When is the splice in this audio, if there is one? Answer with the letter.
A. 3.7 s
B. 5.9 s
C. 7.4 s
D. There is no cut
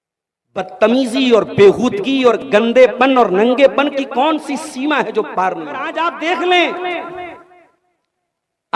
B